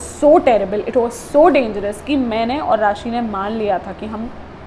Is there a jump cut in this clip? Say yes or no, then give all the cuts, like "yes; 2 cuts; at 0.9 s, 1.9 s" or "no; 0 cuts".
no; 0 cuts